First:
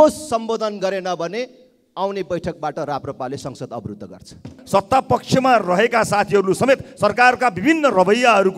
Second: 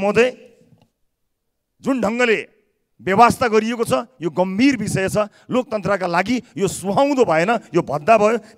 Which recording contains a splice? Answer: first; 1 cut; at 4.6 s

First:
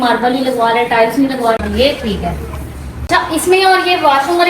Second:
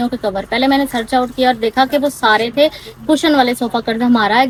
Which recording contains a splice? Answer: first; 2 cuts; at 1.6 s, 2.9 s

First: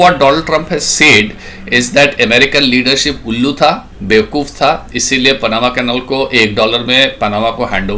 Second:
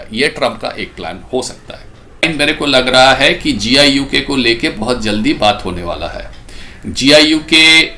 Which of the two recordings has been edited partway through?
second; 1 cut; at 2.3 s

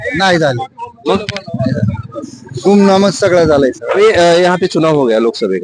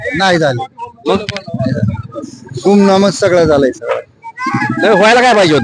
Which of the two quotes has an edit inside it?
first; 1 cut; at 4.0 s

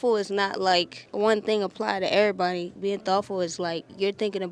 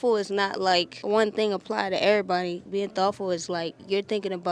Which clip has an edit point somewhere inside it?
second; 1 cut; at 0.9 s

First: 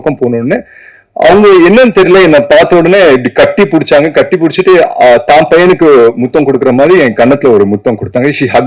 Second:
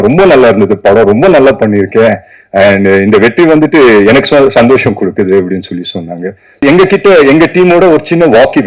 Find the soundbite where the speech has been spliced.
second; 1 cut; at 6.6 s

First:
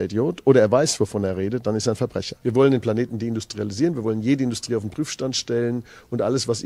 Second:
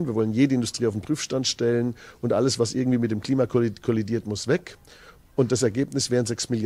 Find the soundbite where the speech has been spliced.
first; 1 cut; at 2.3 s

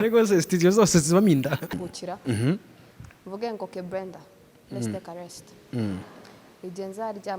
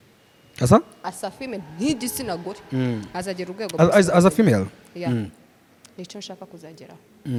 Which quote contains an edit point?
first; 1 cut; at 1.9 s

